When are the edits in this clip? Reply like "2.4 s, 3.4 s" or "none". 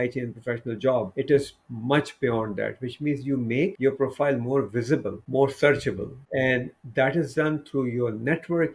1.1 s, 3.8 s, 5.2 s, 6.2 s